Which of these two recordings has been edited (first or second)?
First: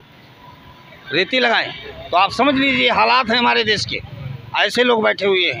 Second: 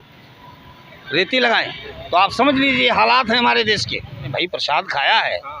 second